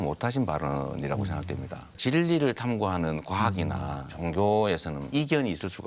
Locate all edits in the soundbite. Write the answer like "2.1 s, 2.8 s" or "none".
2.0 s, 4.1 s, 5.0 s